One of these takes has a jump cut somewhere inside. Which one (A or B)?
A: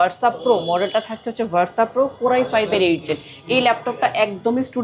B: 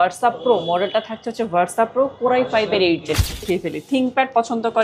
B